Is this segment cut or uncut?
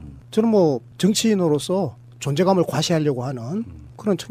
uncut